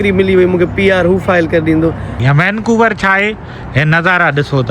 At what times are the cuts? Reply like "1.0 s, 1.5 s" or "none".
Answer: 2.1 s